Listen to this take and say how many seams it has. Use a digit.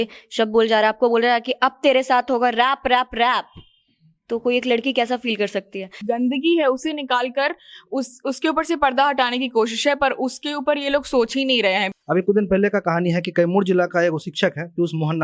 2